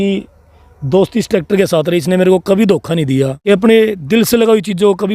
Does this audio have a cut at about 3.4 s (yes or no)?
yes